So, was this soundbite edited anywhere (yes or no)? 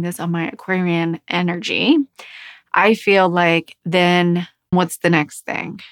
yes